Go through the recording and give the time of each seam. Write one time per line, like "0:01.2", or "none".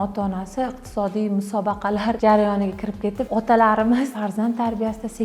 0:02.2
0:03.2
0:04.1